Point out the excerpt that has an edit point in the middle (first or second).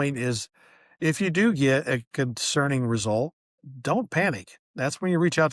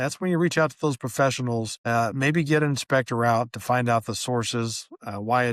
second